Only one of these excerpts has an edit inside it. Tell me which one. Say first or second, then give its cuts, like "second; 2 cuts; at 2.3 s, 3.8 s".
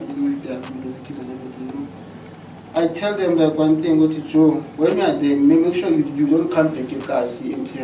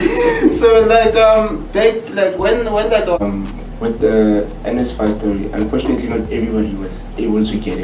second; 1 cut; at 3.2 s